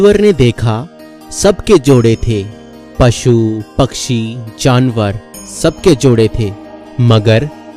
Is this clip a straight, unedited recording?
yes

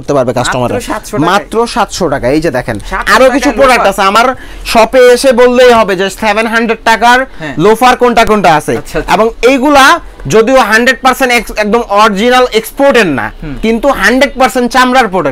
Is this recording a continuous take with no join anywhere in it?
yes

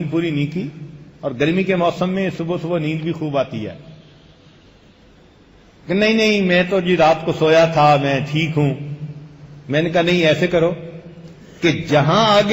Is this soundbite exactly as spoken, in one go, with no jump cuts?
no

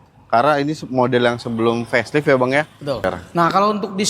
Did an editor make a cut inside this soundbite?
yes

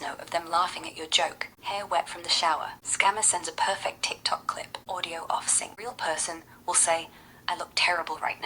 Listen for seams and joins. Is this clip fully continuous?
no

